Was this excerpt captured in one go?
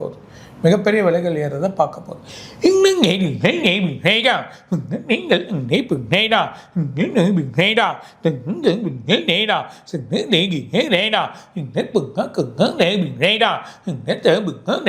yes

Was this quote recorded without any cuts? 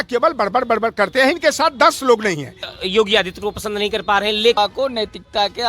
no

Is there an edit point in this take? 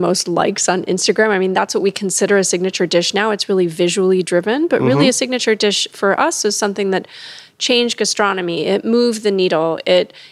no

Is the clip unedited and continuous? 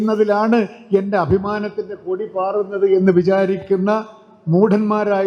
yes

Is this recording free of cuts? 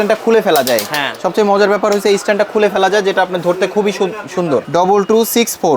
no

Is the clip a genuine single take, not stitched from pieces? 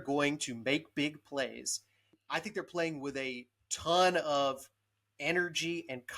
no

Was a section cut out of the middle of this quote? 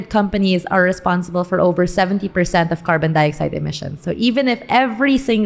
no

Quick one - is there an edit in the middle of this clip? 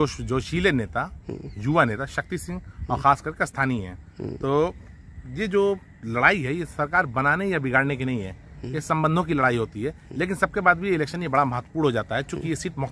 no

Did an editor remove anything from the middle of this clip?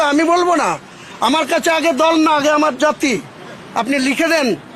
no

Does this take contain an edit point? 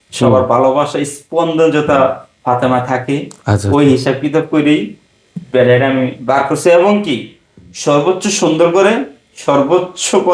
no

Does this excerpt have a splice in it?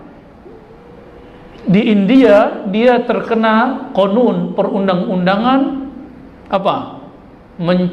no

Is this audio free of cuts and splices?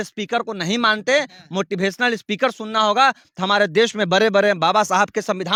yes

